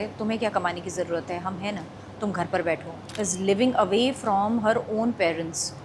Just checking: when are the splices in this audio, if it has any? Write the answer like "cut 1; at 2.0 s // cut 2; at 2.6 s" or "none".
cut 1; at 3.0 s